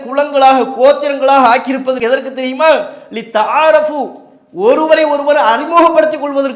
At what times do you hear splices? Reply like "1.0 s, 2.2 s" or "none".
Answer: none